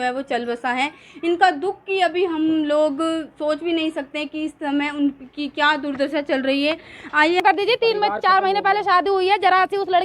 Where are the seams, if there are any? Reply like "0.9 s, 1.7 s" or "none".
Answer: 7.4 s